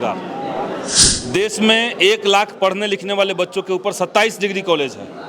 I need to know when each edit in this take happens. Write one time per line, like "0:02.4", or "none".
0:01.0